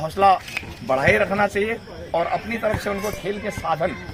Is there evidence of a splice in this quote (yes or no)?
no